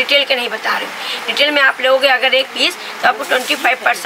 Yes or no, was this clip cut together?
no